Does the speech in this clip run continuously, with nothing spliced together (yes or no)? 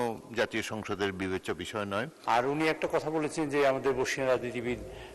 no